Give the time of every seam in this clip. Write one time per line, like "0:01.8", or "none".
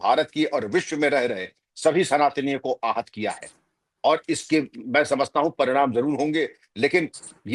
none